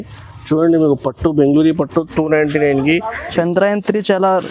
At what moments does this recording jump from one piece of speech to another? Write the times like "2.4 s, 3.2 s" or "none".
3.3 s